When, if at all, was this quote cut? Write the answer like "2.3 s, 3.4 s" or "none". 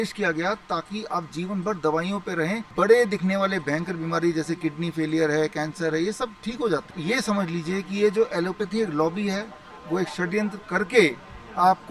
2.6 s, 7.0 s